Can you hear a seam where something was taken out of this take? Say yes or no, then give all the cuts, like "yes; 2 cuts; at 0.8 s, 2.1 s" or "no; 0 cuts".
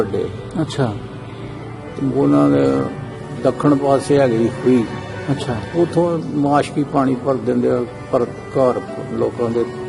no; 0 cuts